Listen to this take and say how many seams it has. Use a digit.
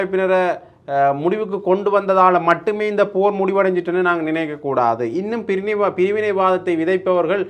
0